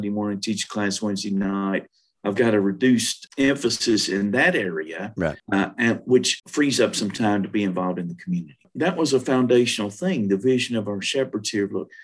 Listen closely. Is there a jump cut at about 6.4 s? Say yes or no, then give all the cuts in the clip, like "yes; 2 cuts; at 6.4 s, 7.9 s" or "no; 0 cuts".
yes; 4 cuts; at 3.2 s, 5.4 s, 6.4 s, 8.7 s